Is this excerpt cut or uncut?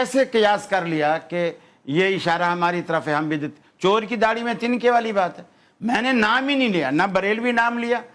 uncut